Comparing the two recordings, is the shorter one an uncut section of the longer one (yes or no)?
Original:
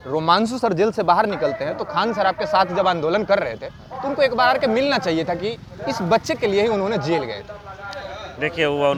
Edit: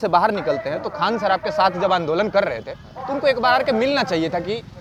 yes